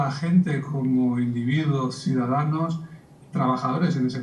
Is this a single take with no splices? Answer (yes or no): yes